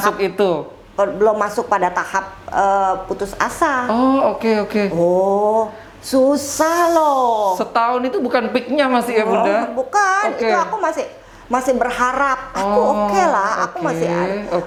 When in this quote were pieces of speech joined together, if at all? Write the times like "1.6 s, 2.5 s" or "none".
none